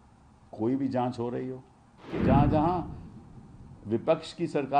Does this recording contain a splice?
yes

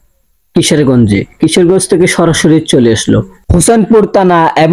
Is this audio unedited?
yes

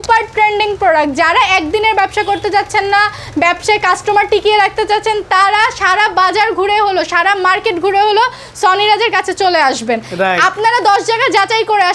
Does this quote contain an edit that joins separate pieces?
no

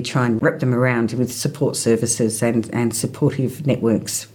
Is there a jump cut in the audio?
no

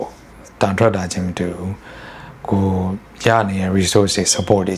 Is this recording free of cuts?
yes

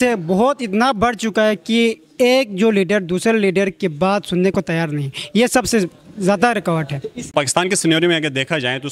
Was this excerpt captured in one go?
no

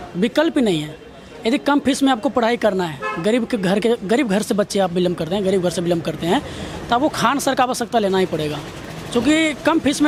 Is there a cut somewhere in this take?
no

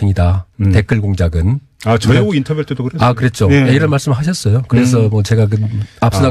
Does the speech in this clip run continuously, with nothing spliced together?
yes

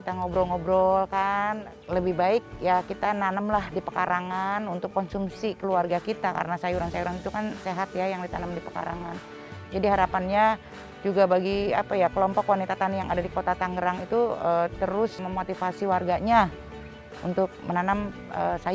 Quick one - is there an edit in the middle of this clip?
yes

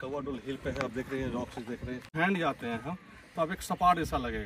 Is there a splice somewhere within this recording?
yes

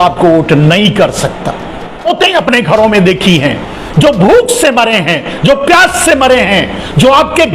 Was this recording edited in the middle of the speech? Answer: yes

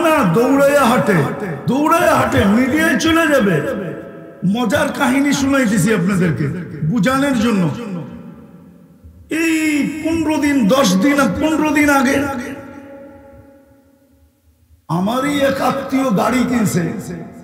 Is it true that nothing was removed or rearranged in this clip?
no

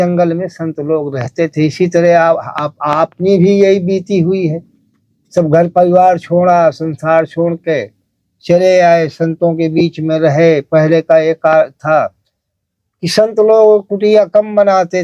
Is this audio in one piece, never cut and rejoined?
yes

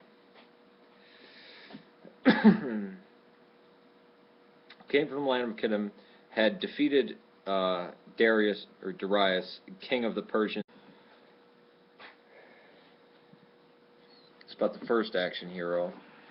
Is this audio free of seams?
yes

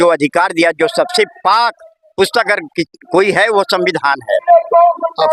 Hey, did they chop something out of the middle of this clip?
yes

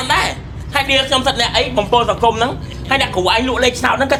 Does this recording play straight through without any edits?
yes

